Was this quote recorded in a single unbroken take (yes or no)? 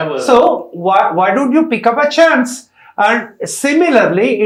yes